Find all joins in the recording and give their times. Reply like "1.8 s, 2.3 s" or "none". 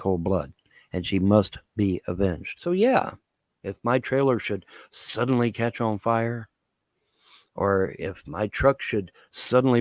2.5 s